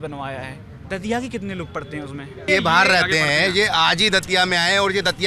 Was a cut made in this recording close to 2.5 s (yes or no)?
yes